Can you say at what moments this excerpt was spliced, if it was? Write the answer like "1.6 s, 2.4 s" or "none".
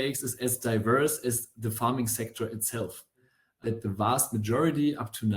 3.4 s